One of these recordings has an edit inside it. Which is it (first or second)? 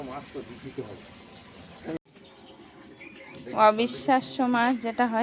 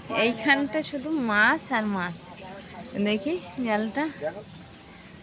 first